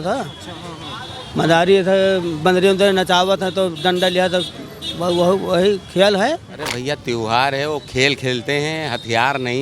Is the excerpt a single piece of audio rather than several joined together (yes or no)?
no